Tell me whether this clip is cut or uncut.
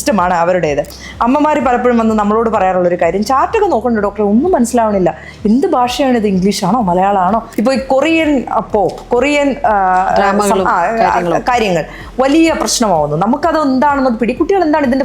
cut